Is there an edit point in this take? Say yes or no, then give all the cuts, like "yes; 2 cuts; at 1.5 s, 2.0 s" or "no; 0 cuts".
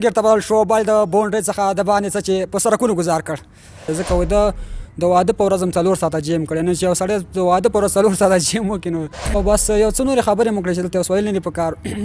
yes; 2 cuts; at 3.9 s, 9.3 s